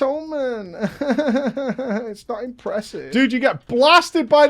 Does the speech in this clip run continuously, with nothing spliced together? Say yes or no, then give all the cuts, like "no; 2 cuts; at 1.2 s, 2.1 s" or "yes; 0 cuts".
no; 1 cut; at 3.0 s